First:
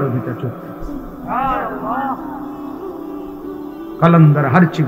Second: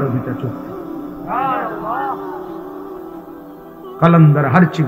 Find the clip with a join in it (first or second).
first